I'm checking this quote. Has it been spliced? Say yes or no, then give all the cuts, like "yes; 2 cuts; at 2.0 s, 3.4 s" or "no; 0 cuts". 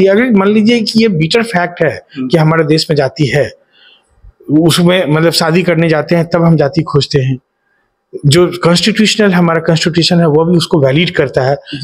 no; 0 cuts